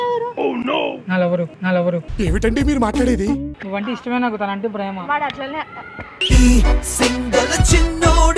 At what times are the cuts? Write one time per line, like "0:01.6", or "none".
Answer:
0:03.5